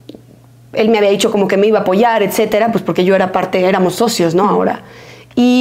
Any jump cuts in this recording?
no; 0 cuts

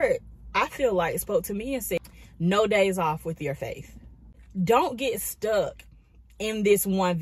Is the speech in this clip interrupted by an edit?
yes; 2 cuts; at 2.0 s, 4.4 s

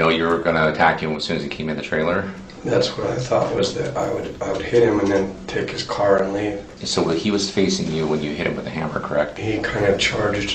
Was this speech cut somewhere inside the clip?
yes; 2 cuts; at 6.8 s, 9.4 s

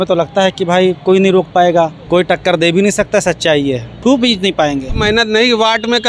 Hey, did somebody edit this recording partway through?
yes; 3 cuts; at 2.0 s, 3.9 s, 5.0 s

